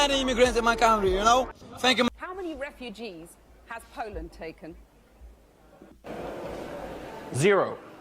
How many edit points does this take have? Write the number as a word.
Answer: one